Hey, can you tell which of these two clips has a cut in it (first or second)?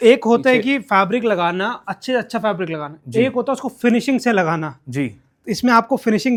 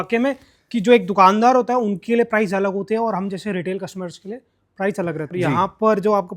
second